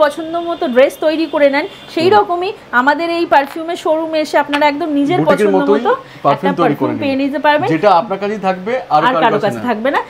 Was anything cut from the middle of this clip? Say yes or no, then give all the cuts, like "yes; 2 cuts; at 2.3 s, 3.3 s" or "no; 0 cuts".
no; 0 cuts